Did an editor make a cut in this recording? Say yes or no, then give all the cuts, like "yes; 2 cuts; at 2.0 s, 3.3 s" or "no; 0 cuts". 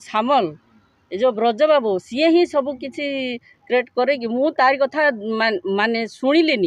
no; 0 cuts